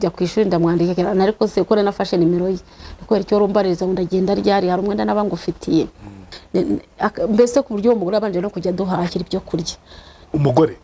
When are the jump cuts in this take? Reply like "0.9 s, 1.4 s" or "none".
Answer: 6.3 s